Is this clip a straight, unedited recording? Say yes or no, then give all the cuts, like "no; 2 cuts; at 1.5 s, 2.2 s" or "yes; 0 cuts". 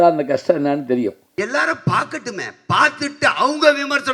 no; 1 cut; at 1.3 s